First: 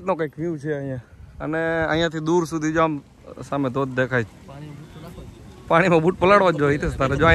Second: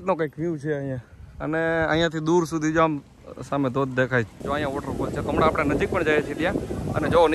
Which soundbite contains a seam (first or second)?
second